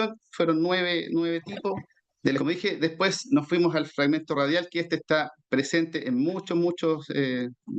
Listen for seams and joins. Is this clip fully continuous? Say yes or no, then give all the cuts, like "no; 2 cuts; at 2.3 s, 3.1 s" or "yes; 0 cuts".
no; 1 cut; at 2.4 s